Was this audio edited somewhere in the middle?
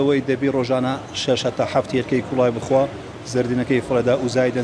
no; 0 cuts

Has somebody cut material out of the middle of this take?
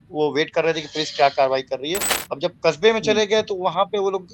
yes; 1 cut; at 2.1 s

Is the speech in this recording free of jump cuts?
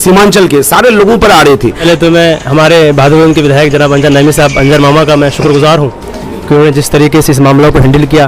no; 1 cut; at 1.8 s

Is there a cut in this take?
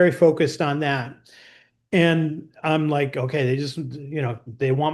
no; 0 cuts

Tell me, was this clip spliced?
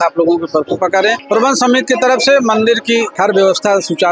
yes; 2 cuts; at 1.2 s, 3.1 s

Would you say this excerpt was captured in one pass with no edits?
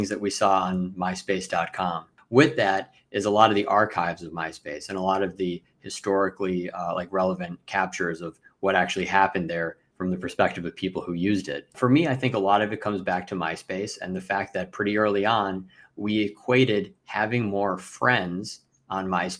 no; 3 cuts; at 2.2 s, 9.8 s, 11.7 s

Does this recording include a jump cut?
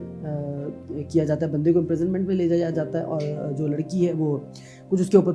no; 0 cuts

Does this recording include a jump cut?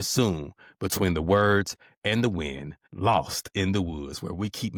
no; 0 cuts

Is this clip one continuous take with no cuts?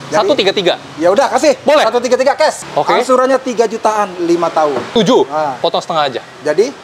no; 2 cuts; at 2.6 s, 4.9 s

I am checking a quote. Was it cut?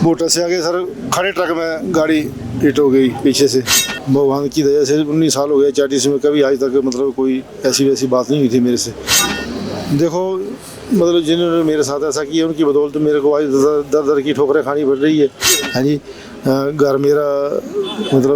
yes; 1 cut; at 3.8 s

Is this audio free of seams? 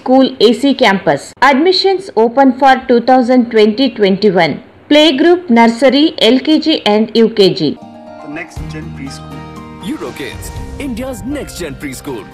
no; 2 cuts; at 1.3 s, 7.8 s

